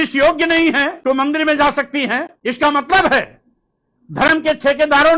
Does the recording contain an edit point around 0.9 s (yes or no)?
yes